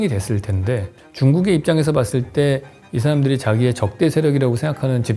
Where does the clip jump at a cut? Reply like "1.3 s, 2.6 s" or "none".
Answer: none